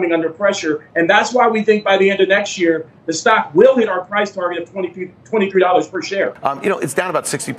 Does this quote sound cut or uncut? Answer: cut